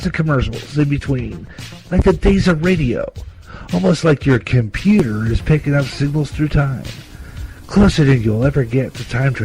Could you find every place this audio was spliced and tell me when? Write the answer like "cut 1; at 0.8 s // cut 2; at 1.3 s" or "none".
none